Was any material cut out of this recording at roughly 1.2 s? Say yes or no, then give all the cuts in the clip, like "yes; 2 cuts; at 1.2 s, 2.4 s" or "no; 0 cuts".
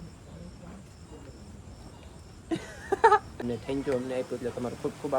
no; 1 cut; at 3.3 s